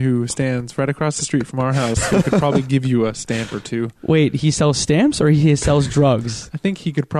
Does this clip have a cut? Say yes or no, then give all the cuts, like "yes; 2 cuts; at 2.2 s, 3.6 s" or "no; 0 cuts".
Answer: no; 0 cuts